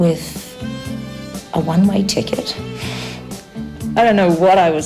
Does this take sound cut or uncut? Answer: uncut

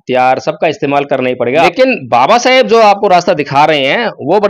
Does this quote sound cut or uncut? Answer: cut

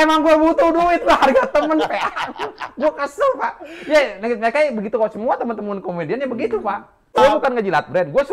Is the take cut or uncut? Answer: cut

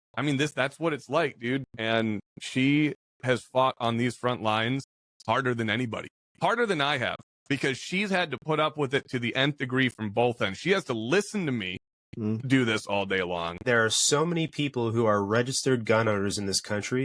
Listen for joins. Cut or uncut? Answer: cut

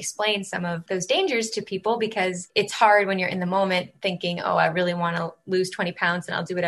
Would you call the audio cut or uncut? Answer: cut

